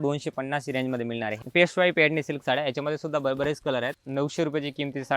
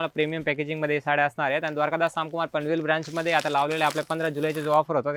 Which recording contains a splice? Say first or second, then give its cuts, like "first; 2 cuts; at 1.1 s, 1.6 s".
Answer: first; 2 cuts; at 1.3 s, 3.9 s